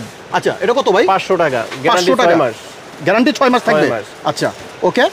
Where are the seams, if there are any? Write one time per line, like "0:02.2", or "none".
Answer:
none